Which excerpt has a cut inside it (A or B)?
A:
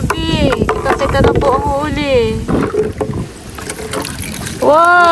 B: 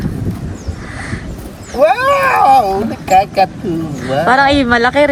A